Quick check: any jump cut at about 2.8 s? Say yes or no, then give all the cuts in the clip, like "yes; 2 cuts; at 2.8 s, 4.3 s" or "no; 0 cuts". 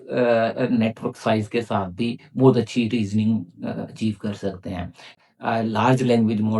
no; 1 cut; at 5.1 s